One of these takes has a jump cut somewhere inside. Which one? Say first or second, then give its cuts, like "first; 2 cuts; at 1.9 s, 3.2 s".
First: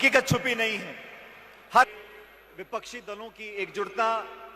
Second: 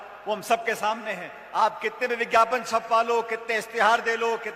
first; 1 cut; at 1.9 s